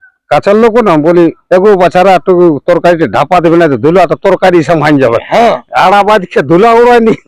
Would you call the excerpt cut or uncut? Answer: uncut